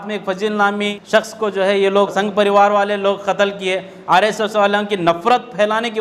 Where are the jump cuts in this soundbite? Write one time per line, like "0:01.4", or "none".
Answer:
0:00.9
0:02.1